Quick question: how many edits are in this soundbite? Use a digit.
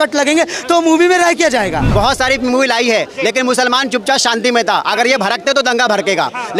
1